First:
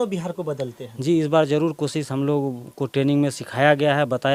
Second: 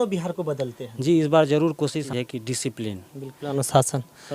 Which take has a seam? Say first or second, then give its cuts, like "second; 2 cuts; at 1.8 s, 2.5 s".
second; 1 cut; at 2.1 s